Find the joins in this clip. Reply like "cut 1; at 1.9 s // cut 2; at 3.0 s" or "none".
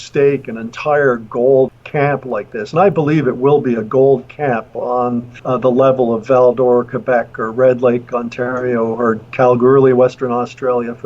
cut 1; at 1.8 s // cut 2; at 5.3 s